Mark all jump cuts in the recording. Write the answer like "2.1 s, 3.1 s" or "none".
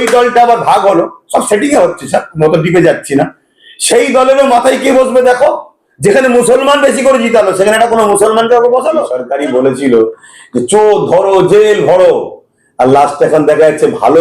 9.2 s